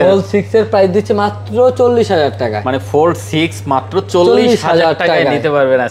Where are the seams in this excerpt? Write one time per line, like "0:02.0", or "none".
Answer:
none